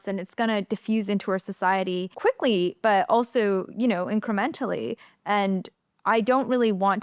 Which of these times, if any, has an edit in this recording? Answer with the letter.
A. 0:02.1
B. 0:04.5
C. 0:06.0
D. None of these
A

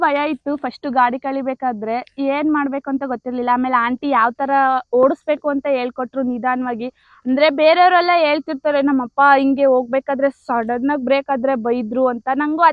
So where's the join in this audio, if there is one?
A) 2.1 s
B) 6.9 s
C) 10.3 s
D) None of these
D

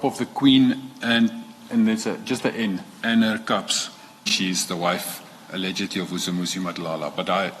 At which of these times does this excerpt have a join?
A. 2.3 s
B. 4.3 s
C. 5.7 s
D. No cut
B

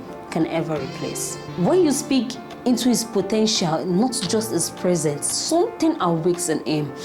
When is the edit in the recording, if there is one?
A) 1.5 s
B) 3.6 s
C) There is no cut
A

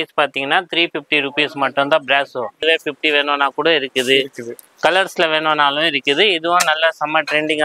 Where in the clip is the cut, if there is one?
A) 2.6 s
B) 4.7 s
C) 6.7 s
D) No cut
A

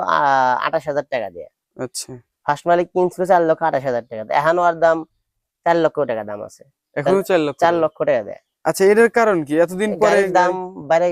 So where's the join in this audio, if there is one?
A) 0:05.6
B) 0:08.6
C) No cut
C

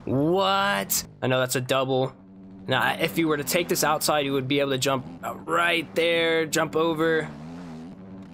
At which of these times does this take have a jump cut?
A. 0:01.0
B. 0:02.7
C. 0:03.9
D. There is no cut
A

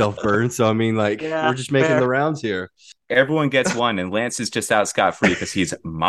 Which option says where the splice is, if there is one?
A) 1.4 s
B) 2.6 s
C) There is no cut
B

